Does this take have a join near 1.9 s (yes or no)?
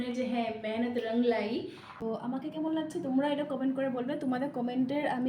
yes